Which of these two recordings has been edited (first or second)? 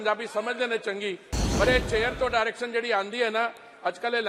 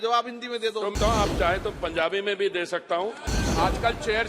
second